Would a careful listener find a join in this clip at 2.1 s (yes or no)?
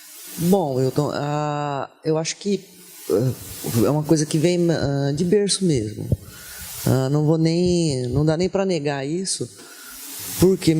no